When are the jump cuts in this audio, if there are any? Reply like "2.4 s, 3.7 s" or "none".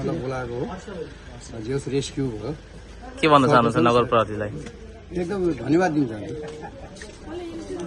none